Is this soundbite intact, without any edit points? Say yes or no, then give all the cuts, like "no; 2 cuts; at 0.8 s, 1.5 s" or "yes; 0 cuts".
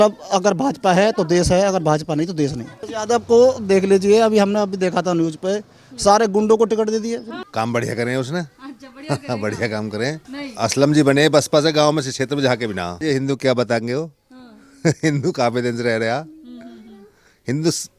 no; 4 cuts; at 2.9 s, 7.4 s, 10.2 s, 12.9 s